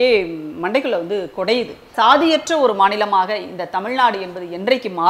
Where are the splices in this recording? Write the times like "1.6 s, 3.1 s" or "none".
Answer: 1.8 s